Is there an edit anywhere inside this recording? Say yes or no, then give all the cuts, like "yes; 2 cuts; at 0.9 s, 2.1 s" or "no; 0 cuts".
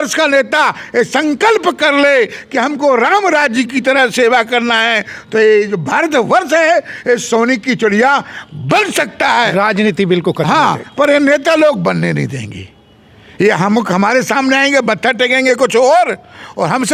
no; 0 cuts